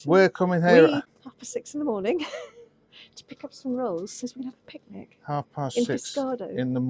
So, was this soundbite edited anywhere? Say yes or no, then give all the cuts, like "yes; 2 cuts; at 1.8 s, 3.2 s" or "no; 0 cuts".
yes; 1 cut; at 1.2 s